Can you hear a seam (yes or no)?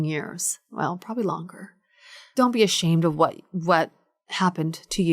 yes